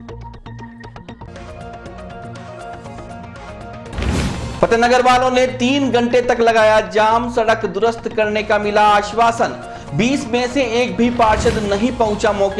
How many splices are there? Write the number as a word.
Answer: one